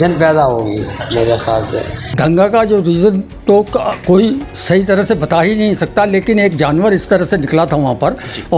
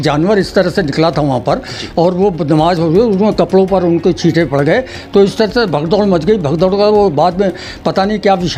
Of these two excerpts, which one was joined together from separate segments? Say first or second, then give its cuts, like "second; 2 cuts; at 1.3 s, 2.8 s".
first; 1 cut; at 2.0 s